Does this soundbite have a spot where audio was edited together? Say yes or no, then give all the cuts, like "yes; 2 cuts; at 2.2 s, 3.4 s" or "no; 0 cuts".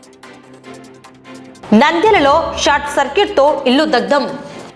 no; 0 cuts